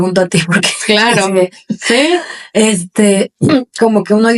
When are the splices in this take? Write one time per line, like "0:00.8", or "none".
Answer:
none